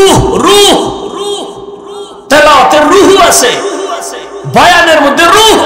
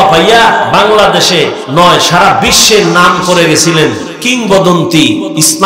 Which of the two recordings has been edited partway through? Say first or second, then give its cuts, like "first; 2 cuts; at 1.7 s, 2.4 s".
second; 2 cuts; at 1.6 s, 4.1 s